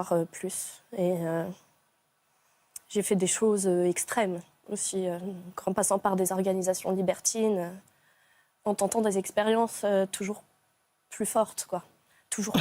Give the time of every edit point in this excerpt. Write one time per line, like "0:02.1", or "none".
0:01.6